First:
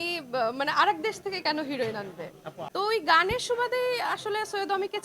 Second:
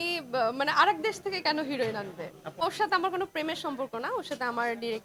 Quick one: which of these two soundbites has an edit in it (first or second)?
first